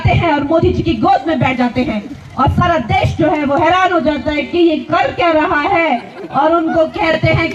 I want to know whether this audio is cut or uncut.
uncut